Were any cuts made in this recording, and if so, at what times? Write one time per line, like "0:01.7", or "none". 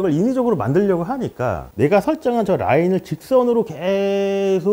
0:01.6